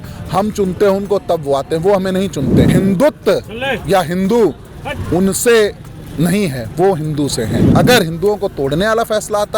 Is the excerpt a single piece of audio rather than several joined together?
no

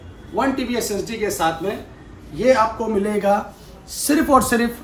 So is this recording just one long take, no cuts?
yes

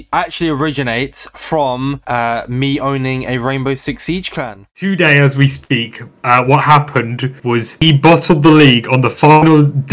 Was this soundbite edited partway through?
yes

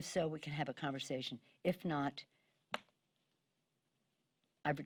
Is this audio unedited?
yes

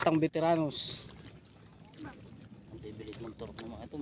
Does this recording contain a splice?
yes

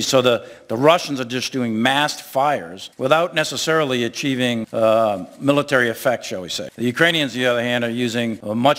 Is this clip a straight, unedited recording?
yes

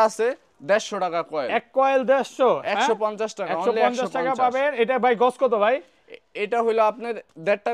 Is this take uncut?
yes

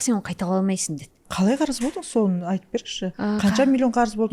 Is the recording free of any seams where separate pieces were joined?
no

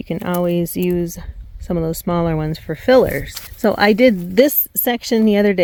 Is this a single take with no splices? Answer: yes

